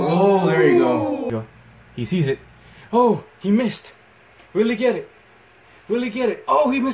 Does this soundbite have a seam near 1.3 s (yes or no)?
yes